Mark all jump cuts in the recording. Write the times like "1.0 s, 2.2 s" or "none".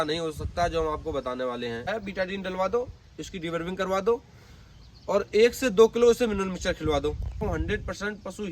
1.9 s, 7.4 s